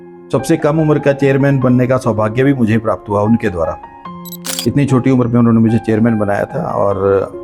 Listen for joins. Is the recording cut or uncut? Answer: uncut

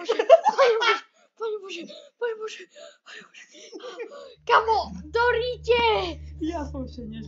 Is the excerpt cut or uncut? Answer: uncut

